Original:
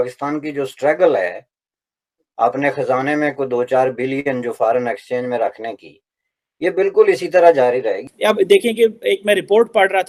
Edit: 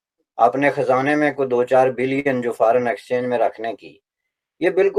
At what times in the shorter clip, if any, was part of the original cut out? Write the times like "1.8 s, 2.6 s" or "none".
none